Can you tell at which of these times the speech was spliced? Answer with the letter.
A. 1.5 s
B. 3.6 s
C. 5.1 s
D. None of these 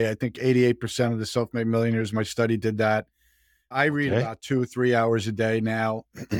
D